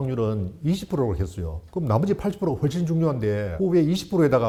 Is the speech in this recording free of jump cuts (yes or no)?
yes